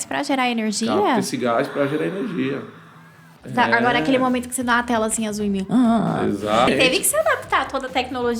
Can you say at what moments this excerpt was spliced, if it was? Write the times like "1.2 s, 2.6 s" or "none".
6.7 s